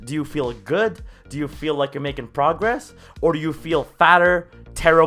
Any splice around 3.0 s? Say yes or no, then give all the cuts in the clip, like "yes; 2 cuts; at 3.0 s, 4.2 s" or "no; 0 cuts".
no; 0 cuts